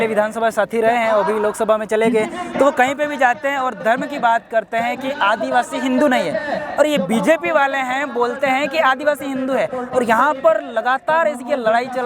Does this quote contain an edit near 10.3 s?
no; 0 cuts

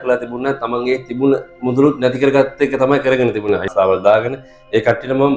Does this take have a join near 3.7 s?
yes; 1 cut; at 3.7 s

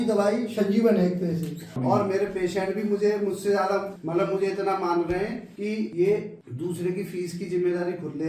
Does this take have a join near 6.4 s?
yes; 4 cuts; at 1.8 s, 3.9 s, 5.8 s, 6.4 s

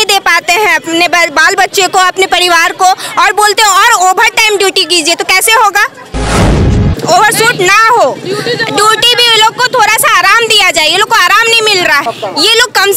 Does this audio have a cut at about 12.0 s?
yes; 2 cuts; at 6.6 s, 12.0 s

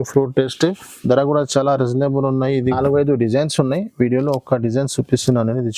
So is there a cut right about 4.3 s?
no; 1 cut; at 2.7 s

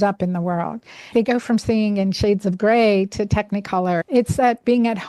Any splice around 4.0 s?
yes; 2 cuts; at 1.1 s, 4.0 s

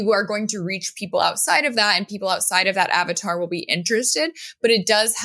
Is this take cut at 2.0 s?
no; 0 cuts

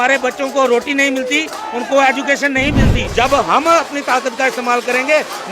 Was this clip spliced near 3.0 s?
yes; 1 cut; at 3.0 s

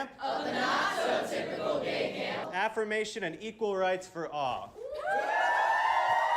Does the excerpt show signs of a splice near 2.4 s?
yes; 2 cuts; at 2.4 s, 4.7 s

